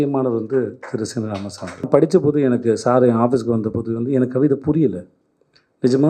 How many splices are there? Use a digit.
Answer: 1